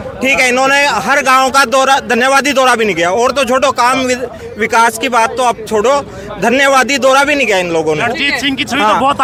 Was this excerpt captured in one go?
yes; 0 cuts

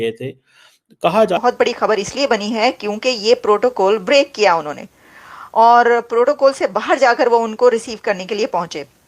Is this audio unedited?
no; 1 cut; at 1.4 s

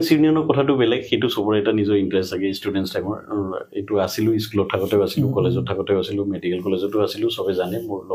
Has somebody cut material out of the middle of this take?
no; 0 cuts

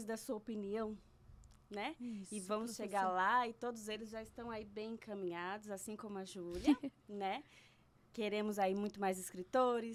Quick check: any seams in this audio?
no; 0 cuts

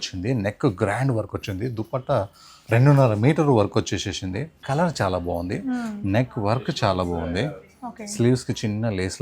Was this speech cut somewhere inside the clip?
yes; 1 cut; at 4.6 s

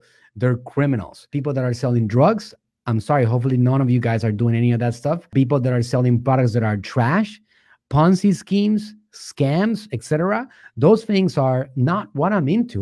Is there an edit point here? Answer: yes; 1 cut; at 5.3 s

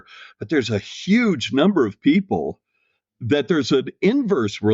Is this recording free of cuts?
no; 1 cut; at 3.0 s

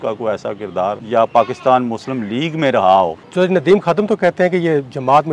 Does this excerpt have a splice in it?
yes; 2 cuts; at 1.0 s, 3.2 s

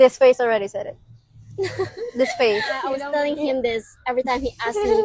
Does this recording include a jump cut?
yes; 1 cut; at 2.9 s

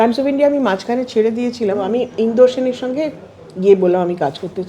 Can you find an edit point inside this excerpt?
yes; 1 cut; at 1.8 s

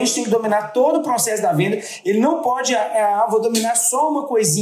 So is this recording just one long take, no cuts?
yes; 0 cuts

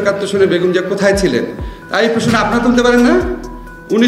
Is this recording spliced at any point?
no; 0 cuts

